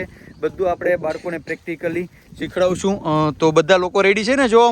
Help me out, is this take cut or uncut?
uncut